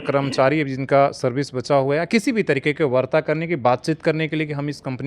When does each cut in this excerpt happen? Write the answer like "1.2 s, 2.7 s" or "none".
none